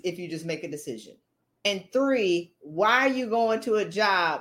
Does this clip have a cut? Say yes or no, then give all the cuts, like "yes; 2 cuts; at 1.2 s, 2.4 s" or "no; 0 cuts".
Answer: yes; 1 cut; at 1.7 s